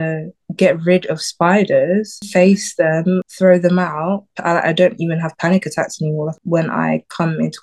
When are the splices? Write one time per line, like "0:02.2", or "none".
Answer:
0:02.2
0:03.2
0:04.3
0:06.4

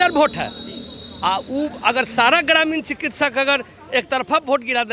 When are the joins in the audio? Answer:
none

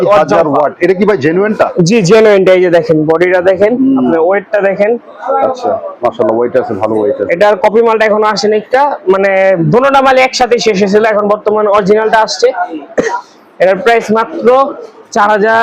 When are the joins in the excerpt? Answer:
none

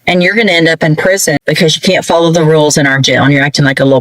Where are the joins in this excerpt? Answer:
0:01.4

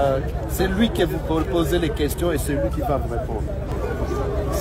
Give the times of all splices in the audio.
0:03.7

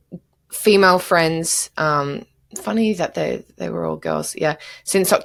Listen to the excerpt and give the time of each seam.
none

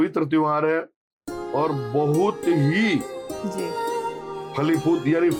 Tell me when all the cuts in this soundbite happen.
none

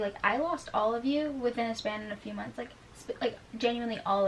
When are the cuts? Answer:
none

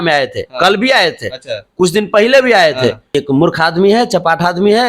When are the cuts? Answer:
0:03.2

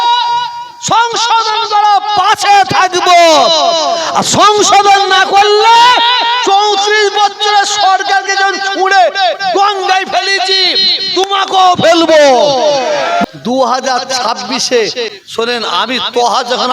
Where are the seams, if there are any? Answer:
0:13.2
0:15.2

